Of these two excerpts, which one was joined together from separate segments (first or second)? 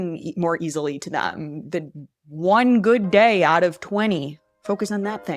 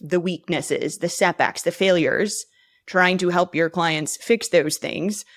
first